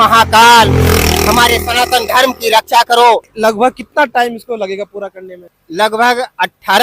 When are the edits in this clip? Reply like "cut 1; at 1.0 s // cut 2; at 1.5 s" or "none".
cut 1; at 3.3 s // cut 2; at 5.6 s